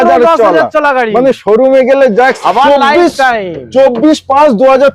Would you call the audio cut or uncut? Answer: cut